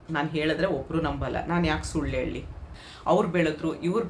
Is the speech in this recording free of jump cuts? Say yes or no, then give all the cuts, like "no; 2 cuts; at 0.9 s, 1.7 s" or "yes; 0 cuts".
no; 1 cut; at 2.8 s